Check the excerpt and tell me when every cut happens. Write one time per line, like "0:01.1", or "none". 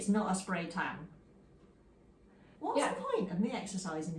0:02.5